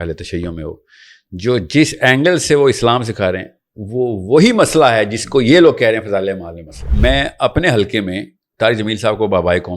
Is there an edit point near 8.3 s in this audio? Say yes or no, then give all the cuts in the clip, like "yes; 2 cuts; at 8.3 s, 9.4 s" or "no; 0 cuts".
no; 1 cut; at 6.9 s